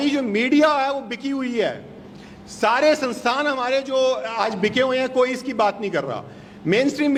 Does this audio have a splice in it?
no; 0 cuts

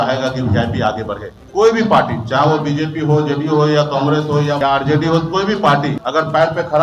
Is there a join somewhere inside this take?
yes; 3 cuts; at 1.4 s, 4.6 s, 6.0 s

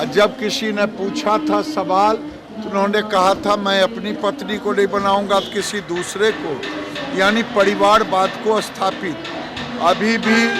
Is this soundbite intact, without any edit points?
yes; 0 cuts

